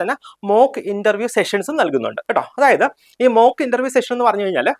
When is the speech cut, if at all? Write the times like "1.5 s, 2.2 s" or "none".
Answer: none